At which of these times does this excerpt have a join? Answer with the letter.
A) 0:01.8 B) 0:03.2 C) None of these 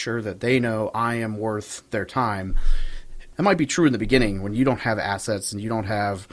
B